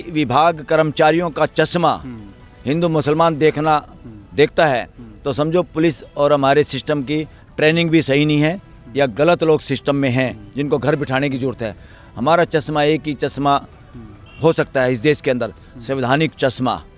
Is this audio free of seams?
yes; 0 cuts

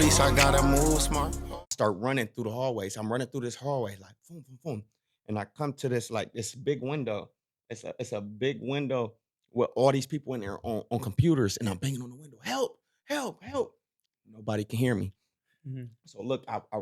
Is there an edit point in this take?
yes; 1 cut; at 1.3 s

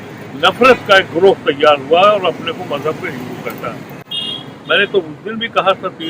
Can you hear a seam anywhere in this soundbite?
no; 0 cuts

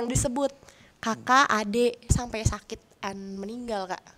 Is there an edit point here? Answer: yes; 1 cut; at 2.1 s

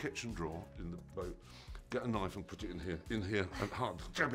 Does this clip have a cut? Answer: no; 0 cuts

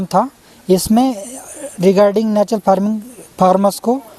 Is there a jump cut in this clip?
no; 0 cuts

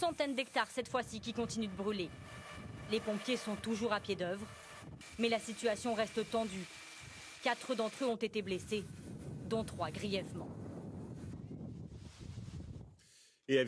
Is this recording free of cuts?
no; 1 cut; at 6.9 s

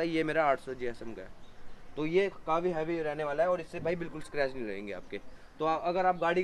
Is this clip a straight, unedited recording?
yes; 0 cuts

